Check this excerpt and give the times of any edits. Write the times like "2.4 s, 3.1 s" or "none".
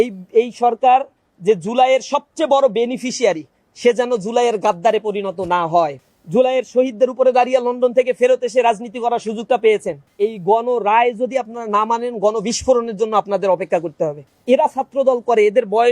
6.0 s, 10.0 s, 14.2 s